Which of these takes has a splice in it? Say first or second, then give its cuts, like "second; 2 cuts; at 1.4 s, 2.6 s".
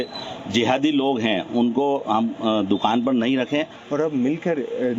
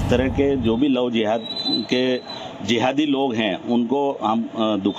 first; 1 cut; at 3.8 s